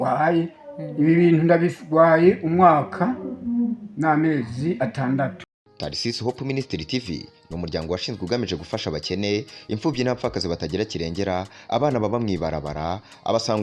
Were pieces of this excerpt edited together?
yes; 1 cut; at 5.6 s

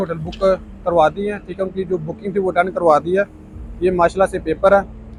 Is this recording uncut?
yes; 0 cuts

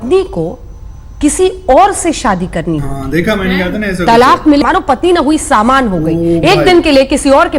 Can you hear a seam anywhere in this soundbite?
yes; 1 cut; at 4.6 s

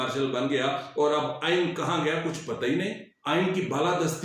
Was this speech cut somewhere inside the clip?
yes; 1 cut; at 3.1 s

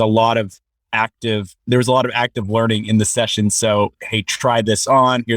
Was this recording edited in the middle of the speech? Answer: yes; 1 cut; at 1.5 s

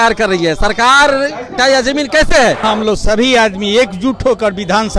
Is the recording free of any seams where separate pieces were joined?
no; 1 cut; at 2.6 s

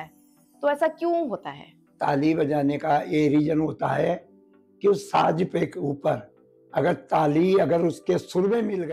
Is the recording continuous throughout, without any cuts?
yes; 0 cuts

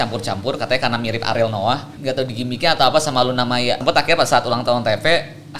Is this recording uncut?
no; 2 cuts; at 1.9 s, 3.8 s

